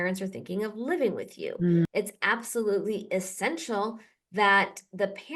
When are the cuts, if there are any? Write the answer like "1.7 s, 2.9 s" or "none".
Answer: 1.8 s